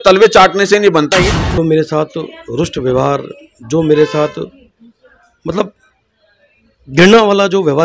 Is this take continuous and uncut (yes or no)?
no